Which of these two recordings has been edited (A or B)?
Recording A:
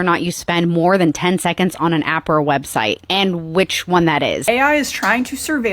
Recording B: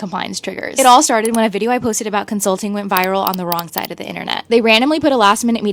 A